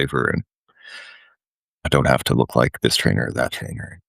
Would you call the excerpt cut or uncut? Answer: cut